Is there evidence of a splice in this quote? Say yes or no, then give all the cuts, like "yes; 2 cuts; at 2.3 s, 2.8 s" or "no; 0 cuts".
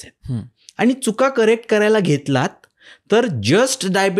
no; 0 cuts